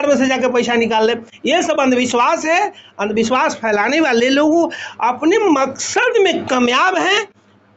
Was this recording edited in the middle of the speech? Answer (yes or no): no